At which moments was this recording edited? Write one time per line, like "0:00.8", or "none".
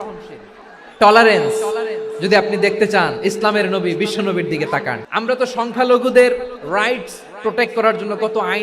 0:05.0